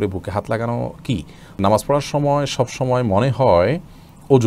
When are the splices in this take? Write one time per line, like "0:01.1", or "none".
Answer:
0:01.6